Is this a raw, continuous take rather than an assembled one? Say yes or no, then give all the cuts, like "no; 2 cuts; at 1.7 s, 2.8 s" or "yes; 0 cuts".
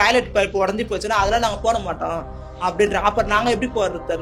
yes; 0 cuts